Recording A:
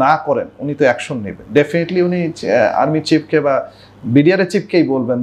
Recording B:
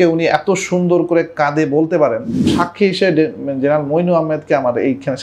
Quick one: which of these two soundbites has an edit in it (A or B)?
B